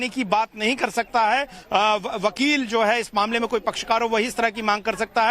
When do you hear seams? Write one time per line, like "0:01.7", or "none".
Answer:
0:02.7